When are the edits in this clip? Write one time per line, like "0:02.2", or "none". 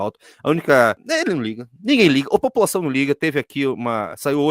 0:01.0

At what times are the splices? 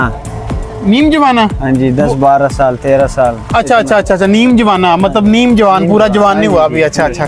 none

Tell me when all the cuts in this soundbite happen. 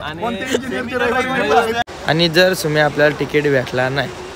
0:01.9

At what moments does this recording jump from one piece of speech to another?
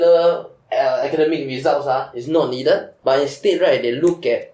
0:02.9

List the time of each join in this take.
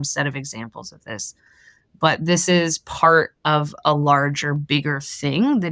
none

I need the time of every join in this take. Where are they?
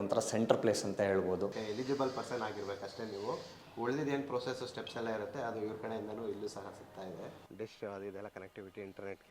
0:01.5
0:07.4

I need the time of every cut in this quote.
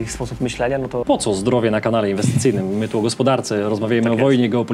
0:01.0

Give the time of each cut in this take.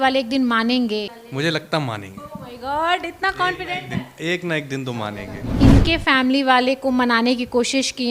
0:01.2
0:05.6

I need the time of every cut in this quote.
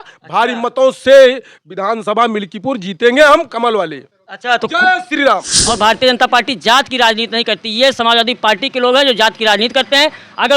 0:05.5

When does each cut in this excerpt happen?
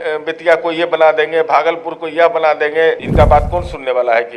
0:03.0

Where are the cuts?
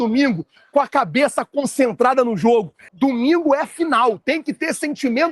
0:02.8

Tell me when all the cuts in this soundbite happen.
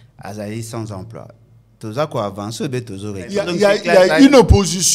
0:03.5

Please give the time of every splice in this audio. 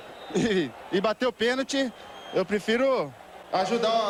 none

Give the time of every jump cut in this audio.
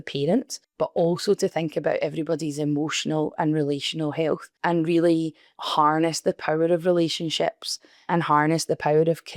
none

